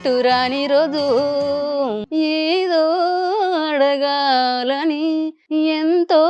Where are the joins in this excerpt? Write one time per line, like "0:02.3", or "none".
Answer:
0:02.0
0:05.4